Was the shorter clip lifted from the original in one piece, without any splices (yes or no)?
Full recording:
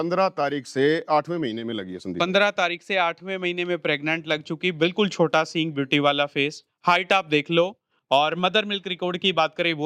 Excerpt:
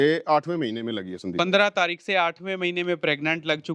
yes